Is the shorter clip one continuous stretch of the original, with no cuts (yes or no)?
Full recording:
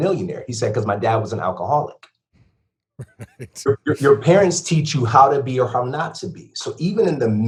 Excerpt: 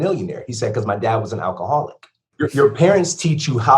no